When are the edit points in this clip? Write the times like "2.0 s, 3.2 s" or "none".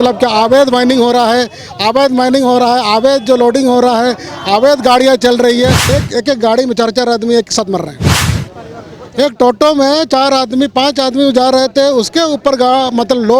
5.9 s